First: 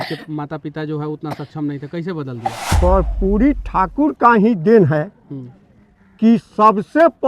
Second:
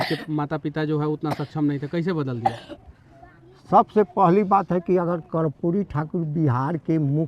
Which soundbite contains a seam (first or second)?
first